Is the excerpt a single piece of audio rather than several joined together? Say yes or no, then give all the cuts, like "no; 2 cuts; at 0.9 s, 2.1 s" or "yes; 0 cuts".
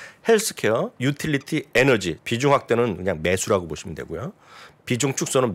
no; 2 cuts; at 0.9 s, 2.1 s